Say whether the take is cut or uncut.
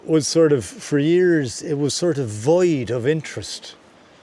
uncut